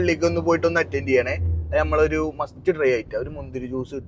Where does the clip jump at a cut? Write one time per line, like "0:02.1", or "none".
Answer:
none

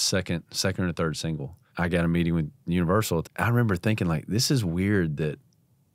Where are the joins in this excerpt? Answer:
0:01.6
0:03.3

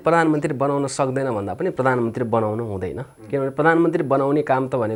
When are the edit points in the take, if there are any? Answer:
none

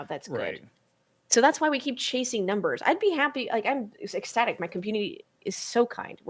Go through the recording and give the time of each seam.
none

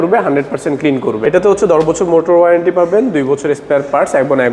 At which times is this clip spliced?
0:01.2

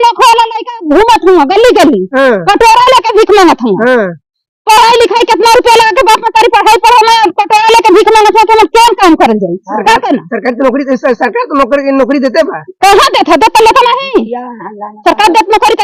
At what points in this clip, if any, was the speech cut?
none

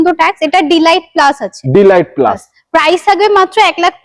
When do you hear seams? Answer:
none

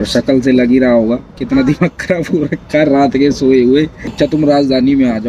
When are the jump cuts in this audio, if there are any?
0:04.1

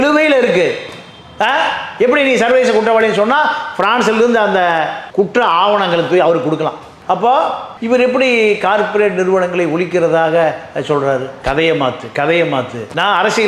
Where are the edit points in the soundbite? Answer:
0:11.4

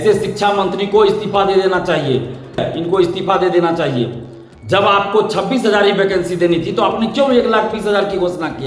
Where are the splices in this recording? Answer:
0:02.7

